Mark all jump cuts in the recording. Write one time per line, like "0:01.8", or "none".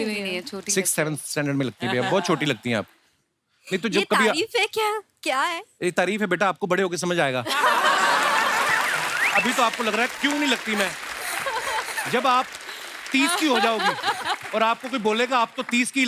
none